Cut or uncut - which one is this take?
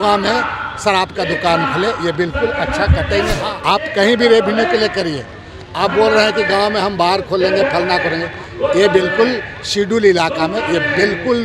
cut